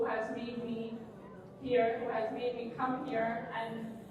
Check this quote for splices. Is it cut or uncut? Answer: uncut